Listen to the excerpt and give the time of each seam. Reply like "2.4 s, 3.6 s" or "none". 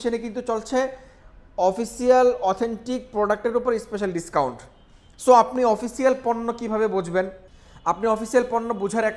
none